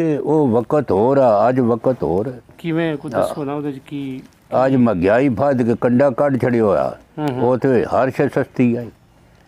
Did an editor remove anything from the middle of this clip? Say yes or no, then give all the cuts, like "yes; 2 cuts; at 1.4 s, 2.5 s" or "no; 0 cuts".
no; 0 cuts